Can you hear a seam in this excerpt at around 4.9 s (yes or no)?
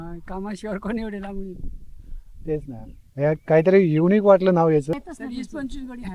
yes